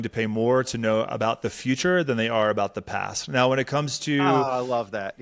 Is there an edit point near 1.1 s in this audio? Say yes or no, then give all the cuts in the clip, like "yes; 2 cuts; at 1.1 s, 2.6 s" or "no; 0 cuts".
no; 0 cuts